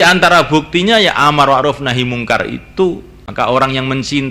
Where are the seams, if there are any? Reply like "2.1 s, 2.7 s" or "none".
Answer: 3.2 s